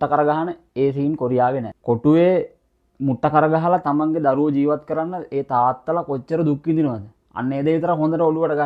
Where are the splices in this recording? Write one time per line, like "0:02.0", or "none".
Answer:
0:01.7